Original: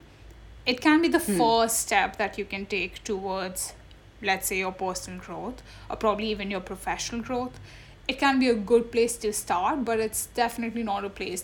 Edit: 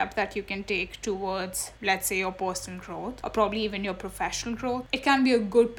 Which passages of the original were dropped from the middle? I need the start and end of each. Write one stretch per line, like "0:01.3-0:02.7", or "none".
0:03.7-0:04.0
0:05.6-0:05.9
0:07.5-0:08.0